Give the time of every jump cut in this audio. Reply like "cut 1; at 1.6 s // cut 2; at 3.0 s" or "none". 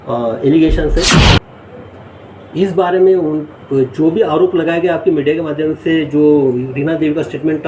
cut 1; at 1.3 s